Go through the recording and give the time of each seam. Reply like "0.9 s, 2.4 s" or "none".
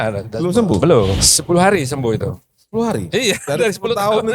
1.2 s